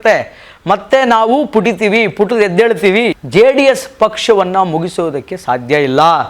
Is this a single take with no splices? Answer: no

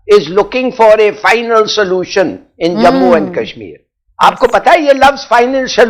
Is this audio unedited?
yes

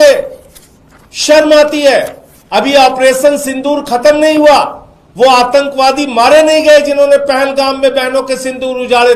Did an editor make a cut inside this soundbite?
no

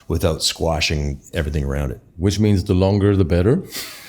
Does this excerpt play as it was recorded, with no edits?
no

